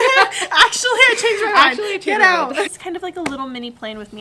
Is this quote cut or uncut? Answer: cut